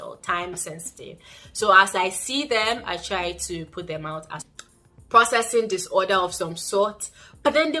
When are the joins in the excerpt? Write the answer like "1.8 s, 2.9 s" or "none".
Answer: 4.5 s

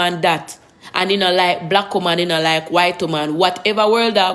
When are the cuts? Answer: none

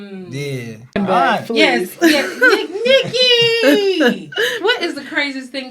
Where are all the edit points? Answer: 1.0 s

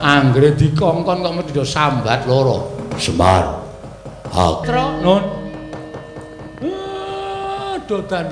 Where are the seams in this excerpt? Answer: 4.6 s

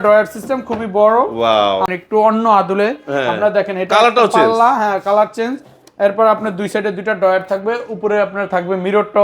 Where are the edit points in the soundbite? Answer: 1.8 s

